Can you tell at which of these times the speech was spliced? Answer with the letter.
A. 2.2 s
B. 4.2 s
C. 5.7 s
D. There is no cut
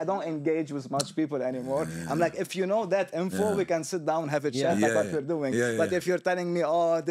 D